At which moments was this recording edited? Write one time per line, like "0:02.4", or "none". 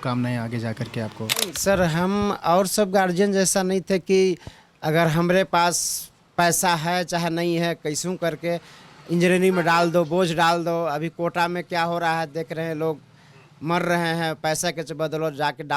0:01.5

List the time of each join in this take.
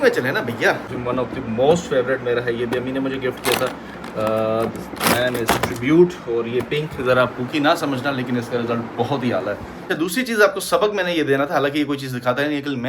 0:00.9
0:09.7

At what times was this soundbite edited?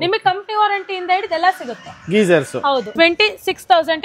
0:02.9

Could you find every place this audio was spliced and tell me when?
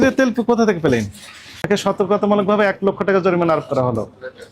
0:01.6

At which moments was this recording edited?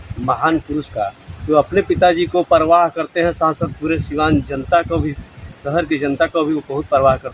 none

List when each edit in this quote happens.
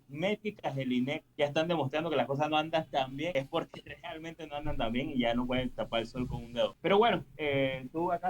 0:01.2
0:03.3
0:06.8

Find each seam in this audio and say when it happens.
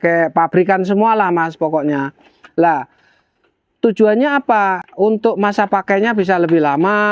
none

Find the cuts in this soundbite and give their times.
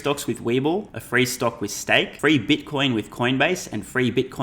0:01.0
0:02.1

